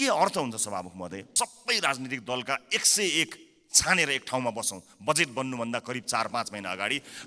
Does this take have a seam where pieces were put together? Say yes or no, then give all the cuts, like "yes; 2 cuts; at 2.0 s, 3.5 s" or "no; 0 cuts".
yes; 1 cut; at 1.2 s